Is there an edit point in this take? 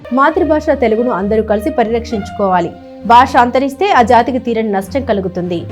no; 0 cuts

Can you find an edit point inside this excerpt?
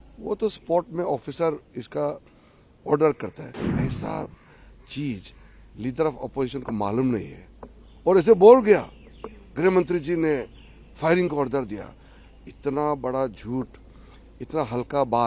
yes; 1 cut; at 3.7 s

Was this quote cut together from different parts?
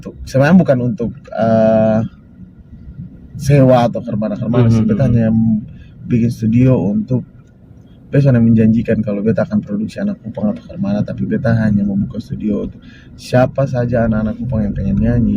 no; 0 cuts

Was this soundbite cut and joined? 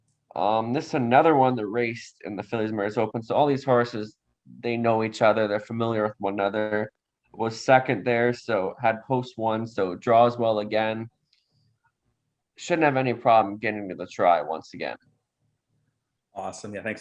no; 0 cuts

